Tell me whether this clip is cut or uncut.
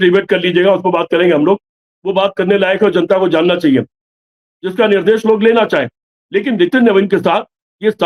cut